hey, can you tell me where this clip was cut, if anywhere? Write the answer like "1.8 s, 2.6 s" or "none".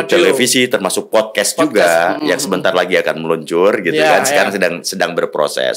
none